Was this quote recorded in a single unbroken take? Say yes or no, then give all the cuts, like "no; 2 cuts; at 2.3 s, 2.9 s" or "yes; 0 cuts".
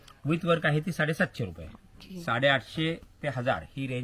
no; 1 cut; at 2.1 s